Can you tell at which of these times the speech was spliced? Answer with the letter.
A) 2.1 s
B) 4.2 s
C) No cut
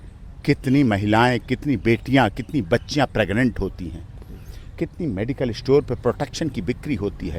C